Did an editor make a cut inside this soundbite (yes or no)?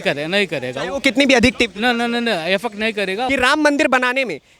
yes